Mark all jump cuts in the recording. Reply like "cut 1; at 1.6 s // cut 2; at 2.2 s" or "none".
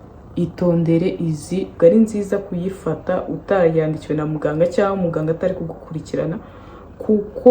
cut 1; at 1.8 s

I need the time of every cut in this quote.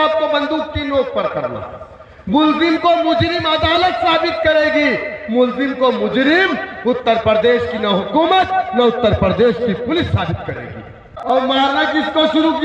cut 1; at 11.1 s

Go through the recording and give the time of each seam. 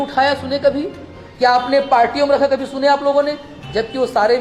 none

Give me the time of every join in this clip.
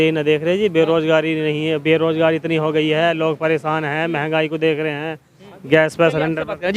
none

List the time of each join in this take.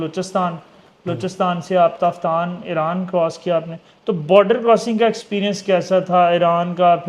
none

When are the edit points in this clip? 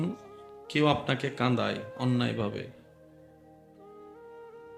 none

